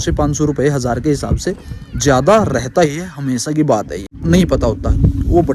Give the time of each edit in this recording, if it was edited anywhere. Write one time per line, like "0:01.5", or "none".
0:04.2